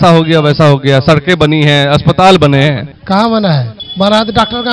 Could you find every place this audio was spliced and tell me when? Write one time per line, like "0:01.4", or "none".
0:02.9
0:03.8